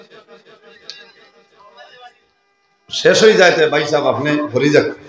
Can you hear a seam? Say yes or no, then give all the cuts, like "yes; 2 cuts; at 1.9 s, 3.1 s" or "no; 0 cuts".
no; 0 cuts